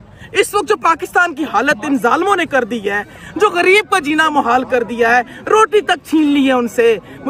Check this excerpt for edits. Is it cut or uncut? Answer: uncut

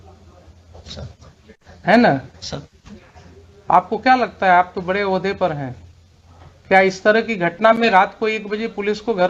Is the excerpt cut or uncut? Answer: uncut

